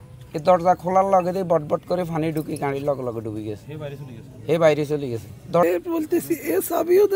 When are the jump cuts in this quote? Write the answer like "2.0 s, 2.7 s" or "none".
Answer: 5.6 s